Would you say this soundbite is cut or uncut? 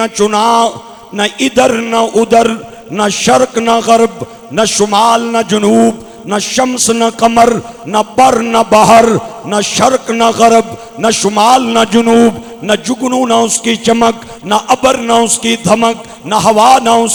uncut